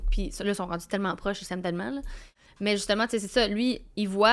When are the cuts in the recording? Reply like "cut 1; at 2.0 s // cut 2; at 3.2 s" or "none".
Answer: cut 1; at 2.2 s